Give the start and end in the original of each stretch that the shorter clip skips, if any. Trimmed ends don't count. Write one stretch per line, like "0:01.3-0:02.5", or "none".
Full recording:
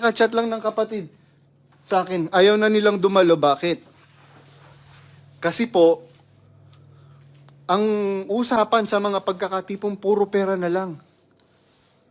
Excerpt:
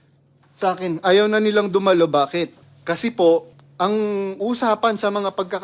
0:04.0-0:05.2
0:06.1-0:07.5